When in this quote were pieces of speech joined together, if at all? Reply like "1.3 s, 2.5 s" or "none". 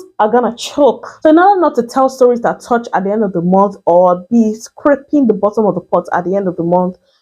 1.1 s